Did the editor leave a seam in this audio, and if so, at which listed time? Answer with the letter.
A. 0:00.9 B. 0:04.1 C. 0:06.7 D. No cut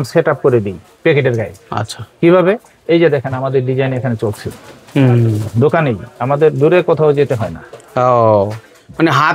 D